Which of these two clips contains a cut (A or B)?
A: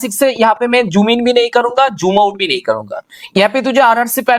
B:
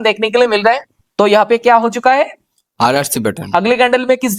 B